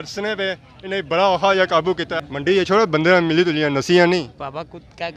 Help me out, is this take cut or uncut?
cut